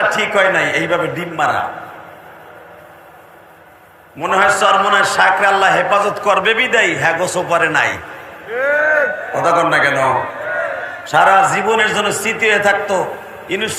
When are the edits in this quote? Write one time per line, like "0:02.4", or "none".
none